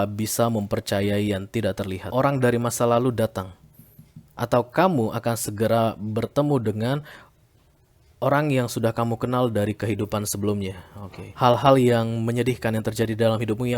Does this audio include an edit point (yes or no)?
yes